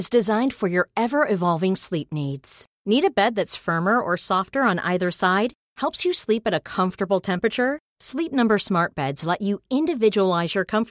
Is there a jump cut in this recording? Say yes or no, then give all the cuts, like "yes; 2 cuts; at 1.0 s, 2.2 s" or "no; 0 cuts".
no; 0 cuts